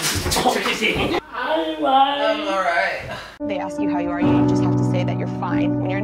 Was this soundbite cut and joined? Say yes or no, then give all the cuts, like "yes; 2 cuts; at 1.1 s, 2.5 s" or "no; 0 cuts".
yes; 1 cut; at 1.2 s